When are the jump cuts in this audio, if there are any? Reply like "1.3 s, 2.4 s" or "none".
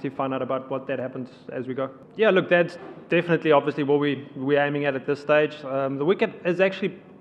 2.0 s